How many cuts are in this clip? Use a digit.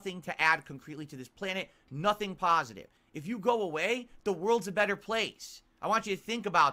1